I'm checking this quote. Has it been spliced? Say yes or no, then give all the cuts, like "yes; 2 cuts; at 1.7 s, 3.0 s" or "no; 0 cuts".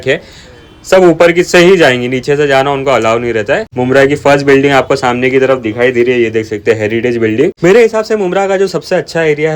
yes; 2 cuts; at 3.7 s, 7.6 s